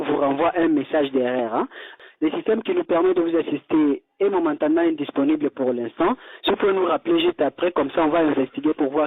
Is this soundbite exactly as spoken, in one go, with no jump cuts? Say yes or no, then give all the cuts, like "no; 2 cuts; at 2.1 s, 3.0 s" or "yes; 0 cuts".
no; 1 cut; at 2.0 s